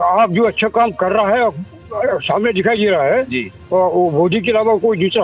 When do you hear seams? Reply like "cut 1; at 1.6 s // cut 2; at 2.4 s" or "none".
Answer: none

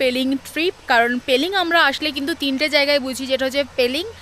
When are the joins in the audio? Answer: none

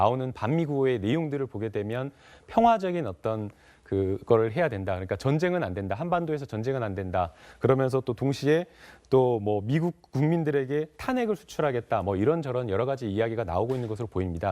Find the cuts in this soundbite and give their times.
cut 1; at 2.2 s

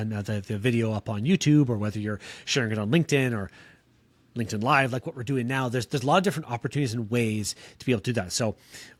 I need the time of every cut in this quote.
none

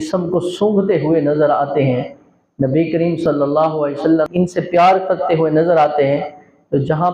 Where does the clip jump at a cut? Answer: cut 1; at 4.3 s

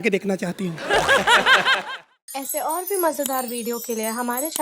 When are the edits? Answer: cut 1; at 1.8 s

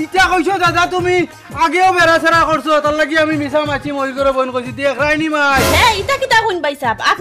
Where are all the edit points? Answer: cut 1; at 5.6 s

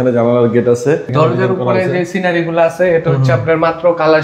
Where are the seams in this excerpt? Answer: cut 1; at 1.1 s

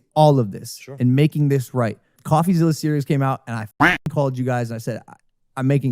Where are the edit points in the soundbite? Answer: cut 1; at 2.2 s

